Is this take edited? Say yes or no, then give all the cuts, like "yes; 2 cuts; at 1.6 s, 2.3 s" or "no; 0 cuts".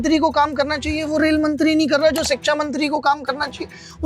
no; 0 cuts